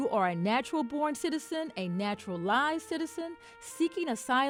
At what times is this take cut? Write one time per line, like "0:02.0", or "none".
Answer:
none